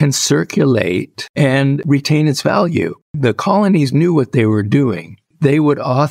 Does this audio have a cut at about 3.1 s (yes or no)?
yes